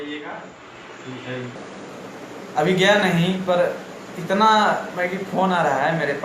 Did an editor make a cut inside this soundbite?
yes; 1 cut; at 1.6 s

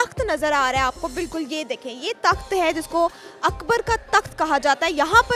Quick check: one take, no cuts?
yes; 0 cuts

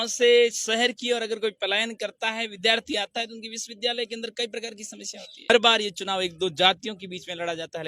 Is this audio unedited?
no; 1 cut; at 5.4 s

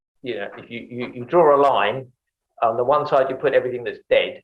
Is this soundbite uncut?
yes; 0 cuts

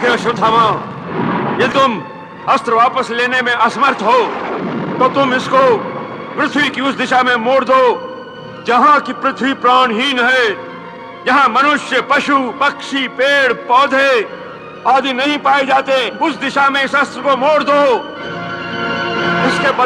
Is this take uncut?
no; 1 cut; at 1.7 s

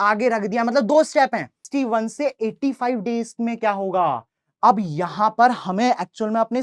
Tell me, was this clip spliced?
yes; 1 cut; at 1.6 s

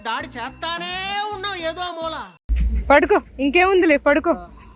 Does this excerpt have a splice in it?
yes; 1 cut; at 2.2 s

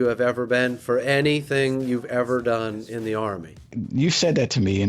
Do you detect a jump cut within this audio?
yes; 1 cut; at 3.7 s

